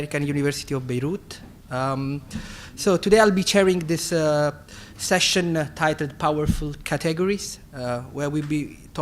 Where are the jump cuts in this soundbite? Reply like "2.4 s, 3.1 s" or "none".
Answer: 8.0 s